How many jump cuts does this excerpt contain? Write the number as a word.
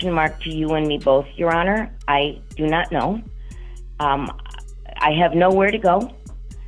zero